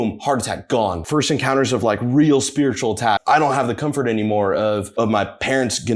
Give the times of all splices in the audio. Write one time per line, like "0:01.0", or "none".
0:01.0
0:03.2
0:04.9

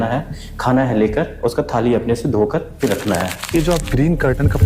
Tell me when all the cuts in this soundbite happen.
0:03.5

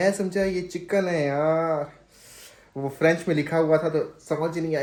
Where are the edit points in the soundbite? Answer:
none

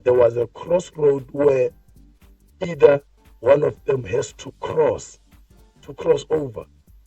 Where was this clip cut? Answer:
none

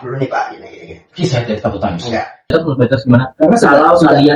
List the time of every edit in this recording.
0:02.5

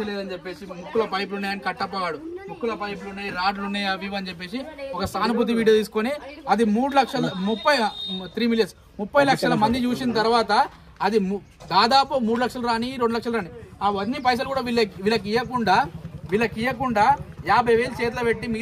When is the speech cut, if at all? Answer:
none

